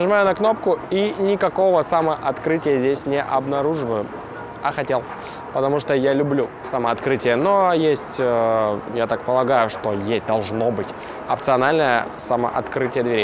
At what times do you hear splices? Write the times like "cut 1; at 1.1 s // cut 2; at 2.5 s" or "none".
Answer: none